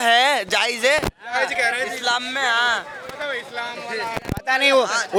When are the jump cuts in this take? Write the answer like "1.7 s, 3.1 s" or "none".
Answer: none